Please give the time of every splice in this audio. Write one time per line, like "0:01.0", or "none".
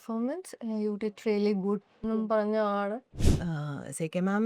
0:03.2